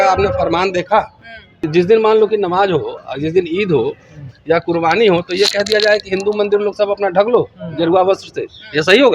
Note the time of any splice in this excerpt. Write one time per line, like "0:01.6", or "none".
0:01.6